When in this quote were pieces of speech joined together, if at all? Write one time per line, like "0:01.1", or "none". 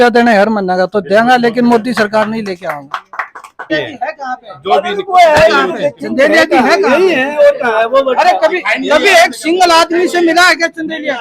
0:03.7